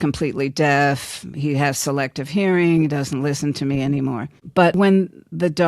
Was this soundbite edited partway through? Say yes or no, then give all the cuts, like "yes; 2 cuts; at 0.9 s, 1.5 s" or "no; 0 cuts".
yes; 1 cut; at 4.5 s